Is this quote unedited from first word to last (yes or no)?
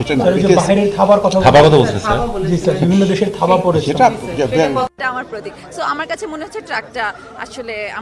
no